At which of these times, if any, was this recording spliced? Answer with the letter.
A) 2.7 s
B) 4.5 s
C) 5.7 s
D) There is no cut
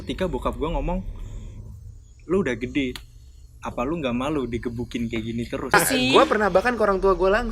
C